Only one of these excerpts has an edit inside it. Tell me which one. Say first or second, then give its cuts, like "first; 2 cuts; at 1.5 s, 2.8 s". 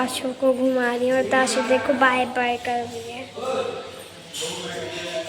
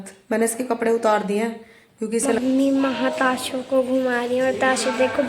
second; 1 cut; at 2.4 s